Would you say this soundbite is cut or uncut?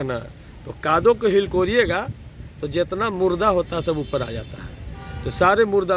uncut